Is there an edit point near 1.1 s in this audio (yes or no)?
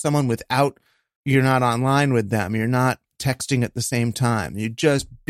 yes